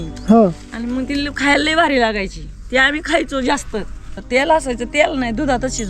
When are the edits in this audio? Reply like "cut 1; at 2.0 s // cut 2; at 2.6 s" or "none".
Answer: cut 1; at 4.2 s